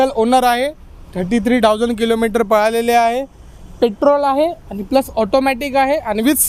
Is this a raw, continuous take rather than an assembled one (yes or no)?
yes